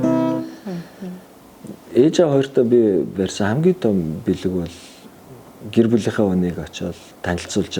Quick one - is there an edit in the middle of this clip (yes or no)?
yes